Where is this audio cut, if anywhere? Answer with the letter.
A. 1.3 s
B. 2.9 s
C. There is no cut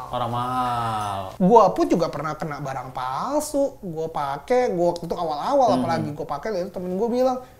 A